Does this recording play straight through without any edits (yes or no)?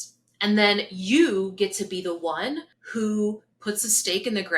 no